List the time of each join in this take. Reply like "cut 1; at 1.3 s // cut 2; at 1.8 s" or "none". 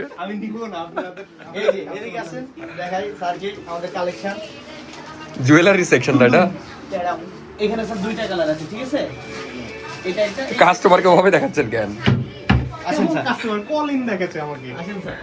none

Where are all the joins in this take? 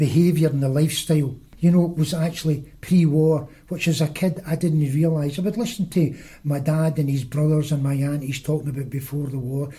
cut 1; at 1.4 s

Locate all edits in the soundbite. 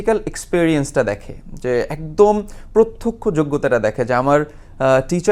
none

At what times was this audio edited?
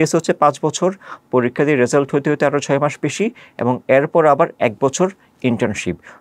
none

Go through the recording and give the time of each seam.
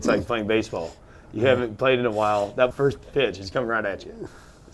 cut 1; at 2.7 s

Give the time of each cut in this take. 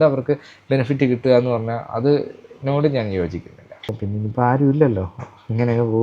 cut 1; at 4.0 s

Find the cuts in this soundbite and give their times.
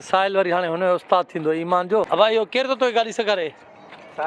cut 1; at 2.1 s

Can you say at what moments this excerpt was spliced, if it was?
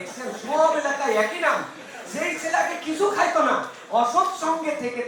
none

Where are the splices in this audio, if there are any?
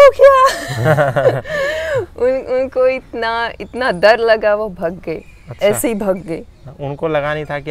none

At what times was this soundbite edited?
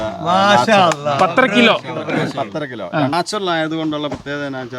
cut 1; at 3.1 s

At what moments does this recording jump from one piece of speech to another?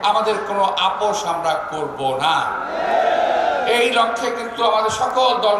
none

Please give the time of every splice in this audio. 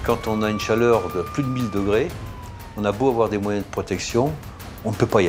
none

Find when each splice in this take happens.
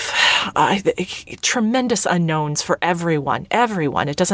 none

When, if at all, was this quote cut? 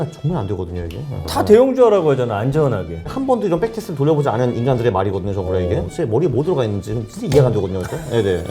cut 1; at 1.3 s // cut 2; at 3.1 s // cut 3; at 5.9 s

